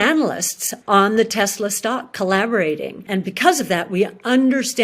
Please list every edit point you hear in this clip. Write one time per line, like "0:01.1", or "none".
0:02.9